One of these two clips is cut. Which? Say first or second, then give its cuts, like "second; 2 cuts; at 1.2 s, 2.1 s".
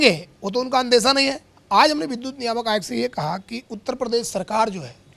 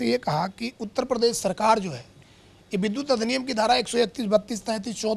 first; 1 cut; at 1.5 s